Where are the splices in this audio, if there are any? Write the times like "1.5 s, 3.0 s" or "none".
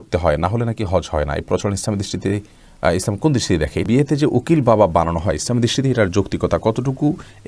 3.9 s